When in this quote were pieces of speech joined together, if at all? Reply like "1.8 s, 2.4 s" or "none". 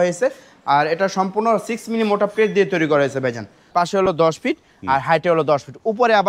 3.7 s